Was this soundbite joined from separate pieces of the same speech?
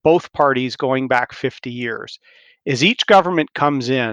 no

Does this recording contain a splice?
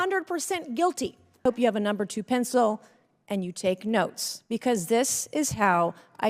yes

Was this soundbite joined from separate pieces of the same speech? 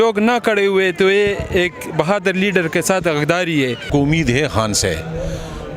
yes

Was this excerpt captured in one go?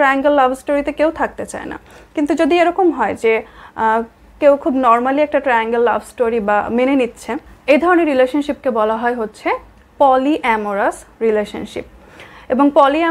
yes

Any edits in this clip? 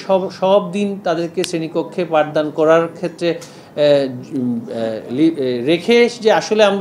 no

